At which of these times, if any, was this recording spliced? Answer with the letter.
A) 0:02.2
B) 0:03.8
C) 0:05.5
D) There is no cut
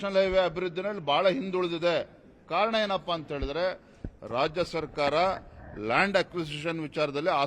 D